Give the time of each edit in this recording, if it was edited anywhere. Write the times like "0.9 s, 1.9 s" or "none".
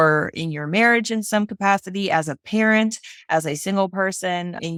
none